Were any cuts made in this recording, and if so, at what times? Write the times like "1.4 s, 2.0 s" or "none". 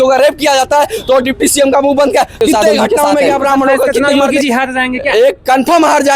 3.9 s